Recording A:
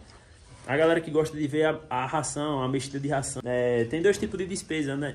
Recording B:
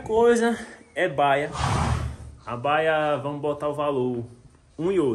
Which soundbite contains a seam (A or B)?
A